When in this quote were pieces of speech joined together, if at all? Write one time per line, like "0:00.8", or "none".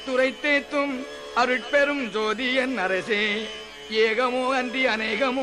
0:01.6